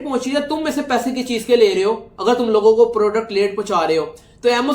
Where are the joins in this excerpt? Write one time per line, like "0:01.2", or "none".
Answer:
none